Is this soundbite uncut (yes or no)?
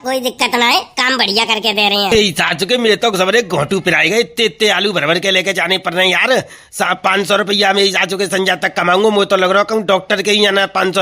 no